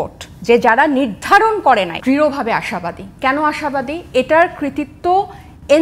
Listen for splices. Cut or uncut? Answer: cut